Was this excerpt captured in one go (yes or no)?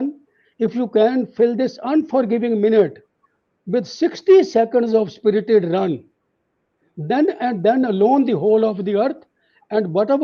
yes